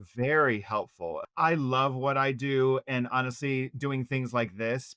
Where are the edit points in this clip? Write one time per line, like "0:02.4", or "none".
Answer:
0:01.2

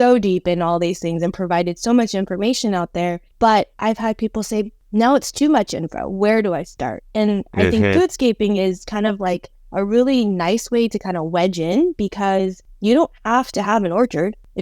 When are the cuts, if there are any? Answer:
0:03.2
0:04.8
0:12.6

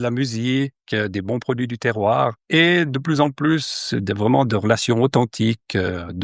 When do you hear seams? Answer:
0:02.4

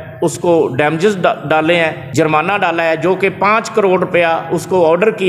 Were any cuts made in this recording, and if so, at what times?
0:02.0

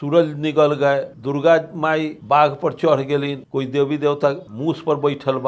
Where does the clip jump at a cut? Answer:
0:01.1
0:02.1
0:03.4
0:04.5

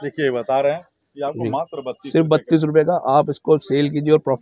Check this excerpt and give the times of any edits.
none

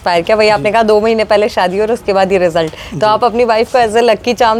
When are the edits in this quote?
none

